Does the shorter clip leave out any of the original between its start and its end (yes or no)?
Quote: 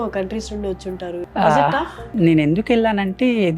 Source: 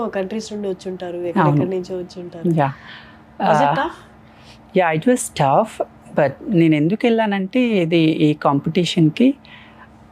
yes